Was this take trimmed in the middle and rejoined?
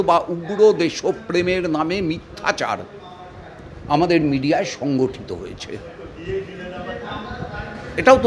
no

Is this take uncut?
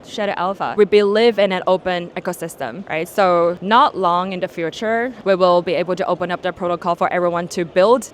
no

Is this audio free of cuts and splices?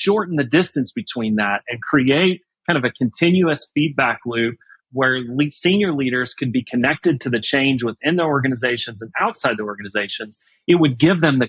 no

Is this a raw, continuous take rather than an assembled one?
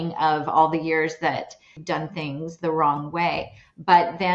no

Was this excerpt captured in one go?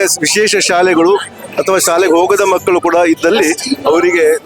yes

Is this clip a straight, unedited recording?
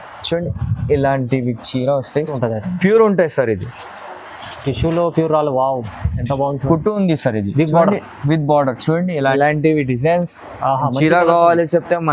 no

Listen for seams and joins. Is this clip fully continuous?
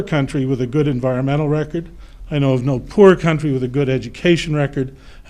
yes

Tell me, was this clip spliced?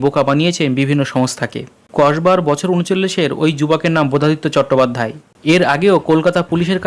yes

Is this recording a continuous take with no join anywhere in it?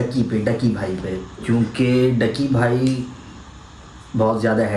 yes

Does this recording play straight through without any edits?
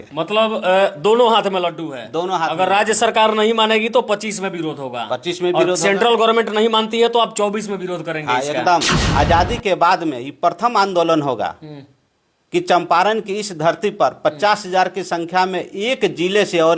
no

